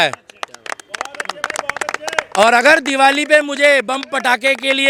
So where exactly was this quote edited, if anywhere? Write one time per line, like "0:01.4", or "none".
none